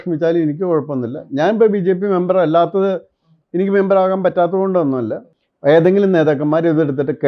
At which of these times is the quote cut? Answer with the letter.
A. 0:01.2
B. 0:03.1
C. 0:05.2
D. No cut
C